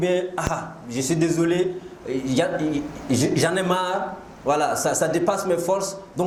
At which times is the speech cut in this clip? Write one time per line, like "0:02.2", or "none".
none